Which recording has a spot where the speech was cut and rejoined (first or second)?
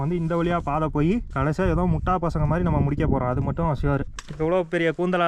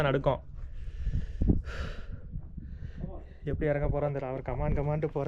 first